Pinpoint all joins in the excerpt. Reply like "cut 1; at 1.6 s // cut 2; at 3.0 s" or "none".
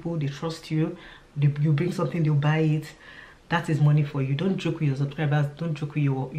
none